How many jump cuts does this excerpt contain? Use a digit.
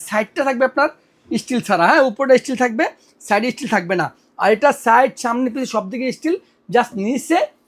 0